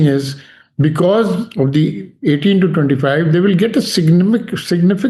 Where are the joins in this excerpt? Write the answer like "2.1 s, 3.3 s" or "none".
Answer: none